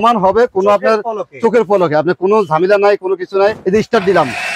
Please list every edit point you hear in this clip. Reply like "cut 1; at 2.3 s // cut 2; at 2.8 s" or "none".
cut 1; at 3.6 s